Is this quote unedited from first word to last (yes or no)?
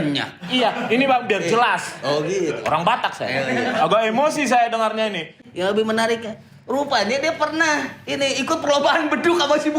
no